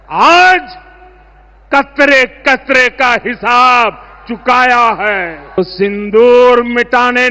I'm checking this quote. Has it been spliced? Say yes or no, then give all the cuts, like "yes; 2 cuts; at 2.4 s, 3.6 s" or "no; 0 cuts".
yes; 1 cut; at 5.6 s